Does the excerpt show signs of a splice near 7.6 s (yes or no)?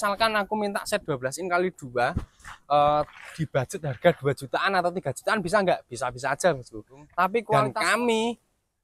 yes